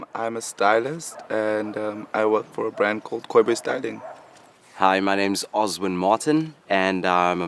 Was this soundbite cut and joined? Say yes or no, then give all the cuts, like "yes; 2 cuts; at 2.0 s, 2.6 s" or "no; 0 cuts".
no; 0 cuts